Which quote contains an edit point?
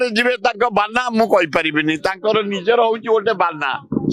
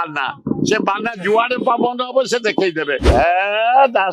second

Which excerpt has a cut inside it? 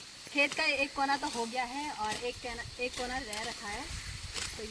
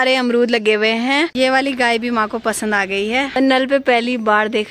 second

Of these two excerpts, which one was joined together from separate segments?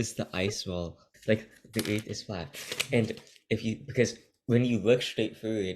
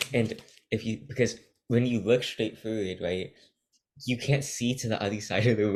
first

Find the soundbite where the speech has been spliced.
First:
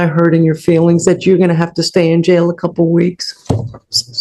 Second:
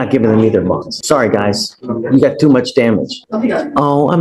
second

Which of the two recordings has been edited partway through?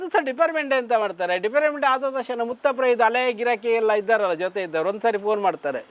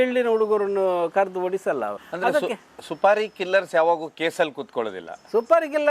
second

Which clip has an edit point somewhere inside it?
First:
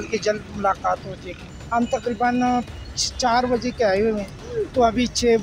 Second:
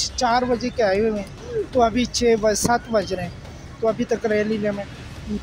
first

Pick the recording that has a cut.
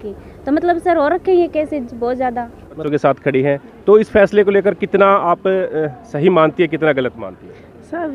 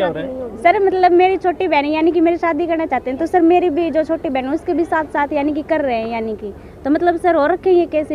first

